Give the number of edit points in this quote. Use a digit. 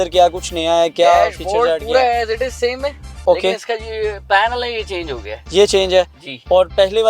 0